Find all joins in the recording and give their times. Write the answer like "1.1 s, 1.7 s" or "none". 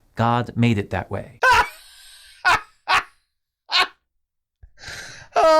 1.3 s